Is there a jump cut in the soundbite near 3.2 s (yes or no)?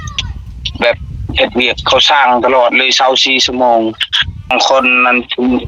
no